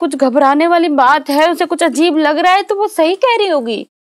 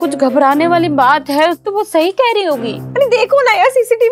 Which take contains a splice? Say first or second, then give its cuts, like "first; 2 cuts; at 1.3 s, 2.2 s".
second; 2 cuts; at 1.6 s, 2.8 s